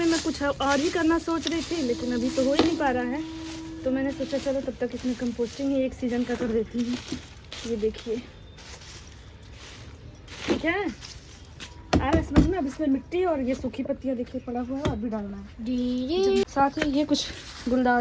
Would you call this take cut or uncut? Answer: uncut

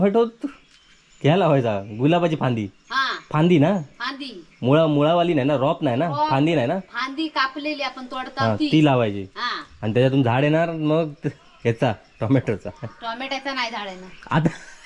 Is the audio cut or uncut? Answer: uncut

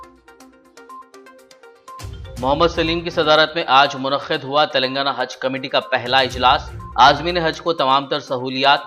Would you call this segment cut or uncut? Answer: cut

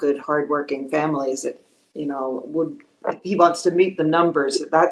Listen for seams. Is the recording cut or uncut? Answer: uncut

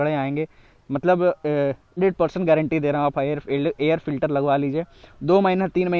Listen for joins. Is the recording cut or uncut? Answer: cut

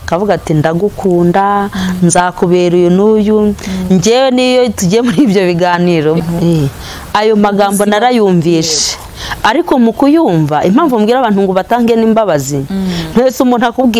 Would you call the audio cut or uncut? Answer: cut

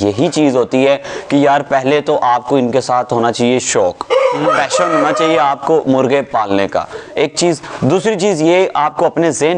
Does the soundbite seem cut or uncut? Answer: uncut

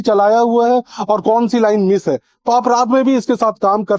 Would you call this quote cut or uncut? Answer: uncut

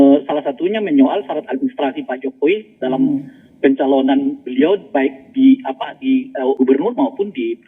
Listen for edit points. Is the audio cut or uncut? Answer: cut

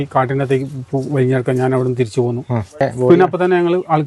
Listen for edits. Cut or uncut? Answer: cut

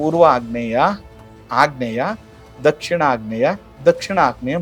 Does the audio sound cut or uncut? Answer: uncut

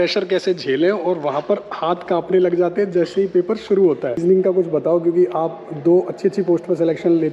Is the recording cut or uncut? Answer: cut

